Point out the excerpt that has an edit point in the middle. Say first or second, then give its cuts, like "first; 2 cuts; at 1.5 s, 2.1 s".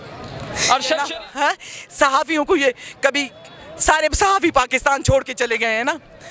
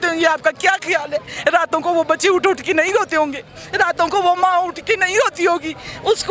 first; 1 cut; at 1.0 s